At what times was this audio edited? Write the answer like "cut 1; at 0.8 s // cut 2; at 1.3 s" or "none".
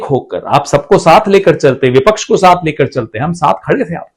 none